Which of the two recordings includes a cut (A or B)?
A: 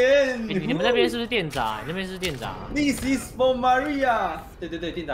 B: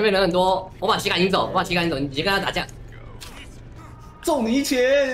B